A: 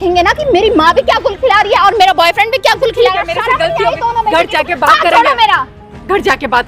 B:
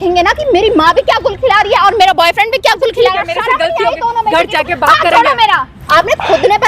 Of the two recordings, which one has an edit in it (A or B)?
B